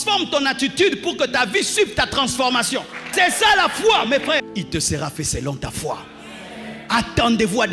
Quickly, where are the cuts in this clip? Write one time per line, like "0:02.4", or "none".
0:03.0
0:04.5
0:06.8